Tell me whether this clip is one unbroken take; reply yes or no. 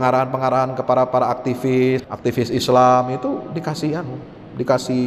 no